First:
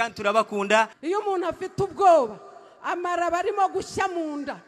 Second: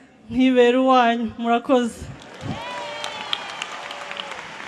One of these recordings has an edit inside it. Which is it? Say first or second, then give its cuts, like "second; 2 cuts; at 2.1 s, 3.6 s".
first; 1 cut; at 1.0 s